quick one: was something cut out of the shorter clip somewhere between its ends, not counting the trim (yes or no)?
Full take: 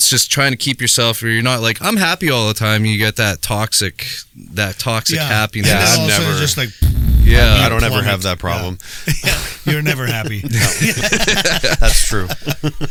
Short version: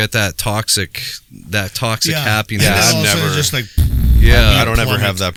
no